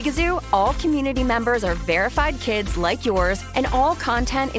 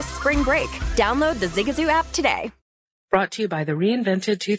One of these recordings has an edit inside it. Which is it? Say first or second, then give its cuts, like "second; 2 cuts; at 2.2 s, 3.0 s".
second; 1 cut; at 2.6 s